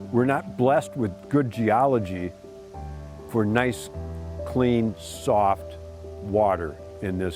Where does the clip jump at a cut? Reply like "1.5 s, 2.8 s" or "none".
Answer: none

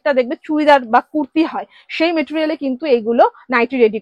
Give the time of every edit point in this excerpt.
none

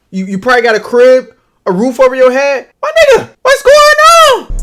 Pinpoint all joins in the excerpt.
2.7 s, 3.3 s

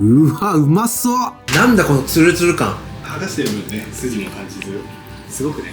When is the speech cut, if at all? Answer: 1.4 s

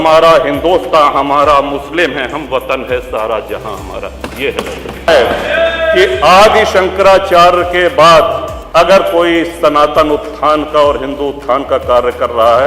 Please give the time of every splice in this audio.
5.1 s, 8.5 s

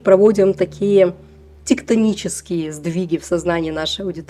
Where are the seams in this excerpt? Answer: none

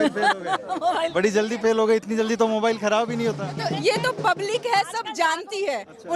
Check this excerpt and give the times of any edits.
none

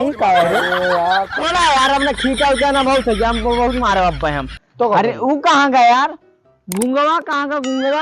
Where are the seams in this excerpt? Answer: 1.4 s

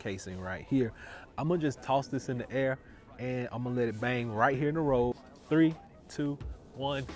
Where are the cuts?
5.3 s

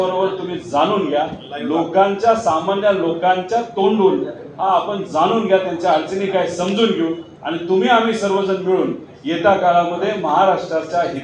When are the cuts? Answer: none

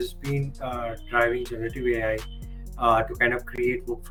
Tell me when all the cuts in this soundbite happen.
none

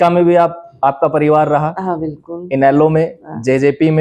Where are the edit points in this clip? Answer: none

